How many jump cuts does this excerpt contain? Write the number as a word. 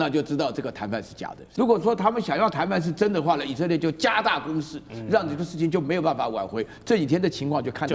one